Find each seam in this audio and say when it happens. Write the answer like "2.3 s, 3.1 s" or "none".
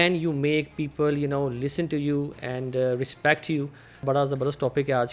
4.0 s